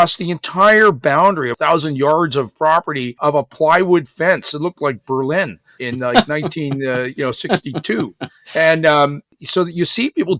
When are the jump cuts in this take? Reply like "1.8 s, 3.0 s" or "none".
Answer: 1.5 s, 3.2 s, 5.8 s, 9.2 s